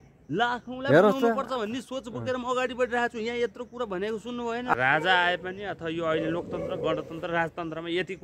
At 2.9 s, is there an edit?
no; 1 cut; at 4.7 s

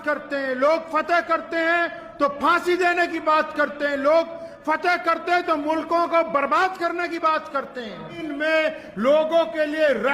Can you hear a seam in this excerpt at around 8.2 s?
yes; 1 cut; at 8.2 s

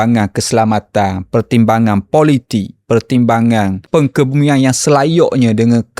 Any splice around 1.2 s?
no; 1 cut; at 3.8 s

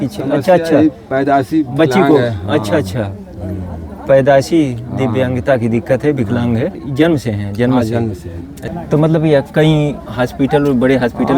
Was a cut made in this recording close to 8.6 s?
yes; 2 cuts; at 6.8 s, 8.6 s

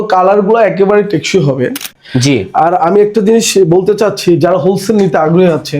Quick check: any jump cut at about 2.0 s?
yes; 1 cut; at 2.0 s

